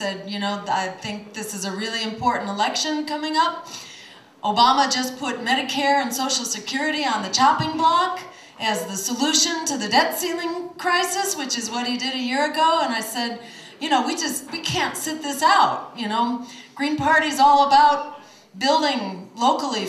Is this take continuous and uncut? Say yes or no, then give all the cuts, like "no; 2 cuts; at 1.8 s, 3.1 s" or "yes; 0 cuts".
no; 1 cut; at 13.6 s